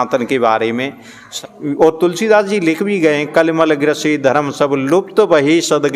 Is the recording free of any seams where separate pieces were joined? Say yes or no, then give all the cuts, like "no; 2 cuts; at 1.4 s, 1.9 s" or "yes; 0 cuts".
no; 1 cut; at 1.2 s